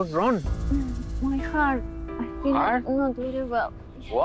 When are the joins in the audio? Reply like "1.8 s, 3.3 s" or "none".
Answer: none